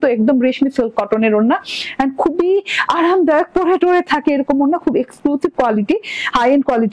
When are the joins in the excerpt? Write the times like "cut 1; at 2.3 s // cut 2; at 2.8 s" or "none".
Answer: none